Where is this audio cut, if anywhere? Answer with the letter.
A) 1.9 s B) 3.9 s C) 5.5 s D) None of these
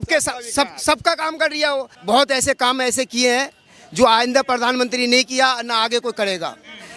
A